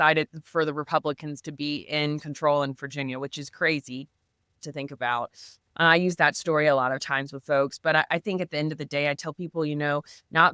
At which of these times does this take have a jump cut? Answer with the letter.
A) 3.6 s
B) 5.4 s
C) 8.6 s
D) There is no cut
D